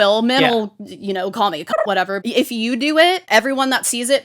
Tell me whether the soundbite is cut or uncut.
cut